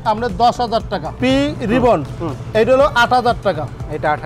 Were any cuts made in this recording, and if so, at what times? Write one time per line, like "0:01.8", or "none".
0:01.2